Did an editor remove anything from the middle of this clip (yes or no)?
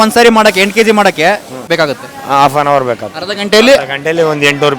yes